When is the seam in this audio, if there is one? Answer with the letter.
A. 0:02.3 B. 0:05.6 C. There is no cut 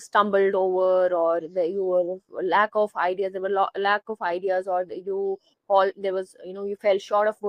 C